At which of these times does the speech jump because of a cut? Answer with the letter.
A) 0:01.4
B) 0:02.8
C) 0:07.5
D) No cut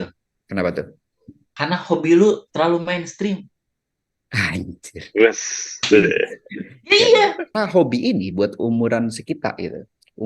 C